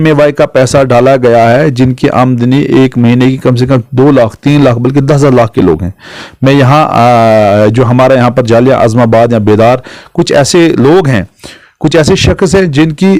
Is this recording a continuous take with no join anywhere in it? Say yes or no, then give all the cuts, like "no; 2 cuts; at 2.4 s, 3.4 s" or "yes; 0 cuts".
yes; 0 cuts